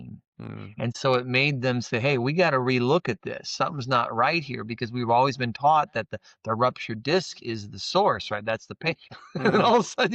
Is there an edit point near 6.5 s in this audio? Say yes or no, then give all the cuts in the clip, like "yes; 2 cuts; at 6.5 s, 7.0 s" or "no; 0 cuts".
no; 1 cut; at 9.1 s